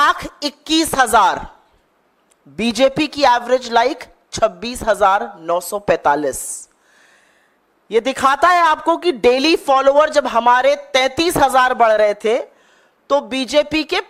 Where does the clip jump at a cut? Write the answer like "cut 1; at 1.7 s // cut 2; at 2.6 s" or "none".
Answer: none